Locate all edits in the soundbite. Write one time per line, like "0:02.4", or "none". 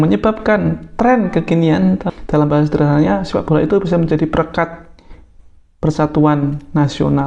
0:02.0